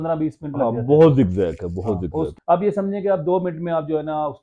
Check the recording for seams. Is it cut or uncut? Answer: cut